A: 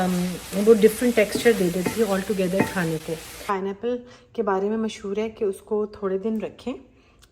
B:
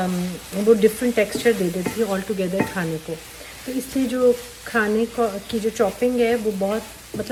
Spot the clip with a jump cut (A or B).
A